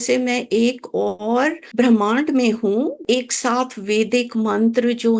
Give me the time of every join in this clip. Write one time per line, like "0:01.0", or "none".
0:01.6
0:03.0